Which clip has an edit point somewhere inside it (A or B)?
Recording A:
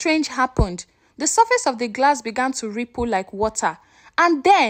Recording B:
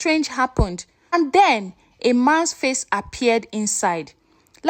B